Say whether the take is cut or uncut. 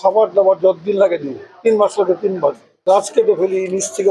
cut